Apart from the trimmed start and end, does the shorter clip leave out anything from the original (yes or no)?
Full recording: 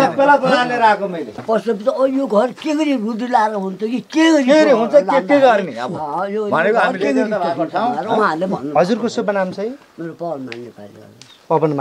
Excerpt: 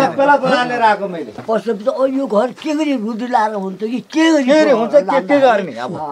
no